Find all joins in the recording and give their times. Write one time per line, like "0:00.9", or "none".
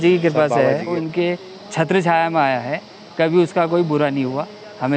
0:01.0